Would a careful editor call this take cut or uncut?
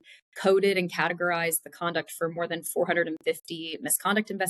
uncut